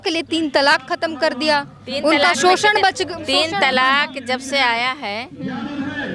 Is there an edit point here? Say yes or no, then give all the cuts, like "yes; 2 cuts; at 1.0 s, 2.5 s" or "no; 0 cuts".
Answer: no; 0 cuts